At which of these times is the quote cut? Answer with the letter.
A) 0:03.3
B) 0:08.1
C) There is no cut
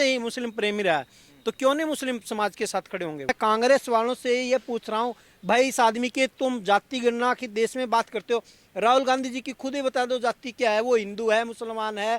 A